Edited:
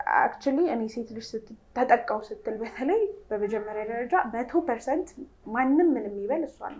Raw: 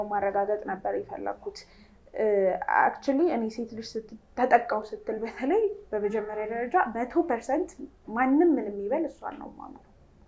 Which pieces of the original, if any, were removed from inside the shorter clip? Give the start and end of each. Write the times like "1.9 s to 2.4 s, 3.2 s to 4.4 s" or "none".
none